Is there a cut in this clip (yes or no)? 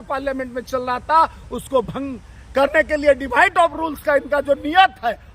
no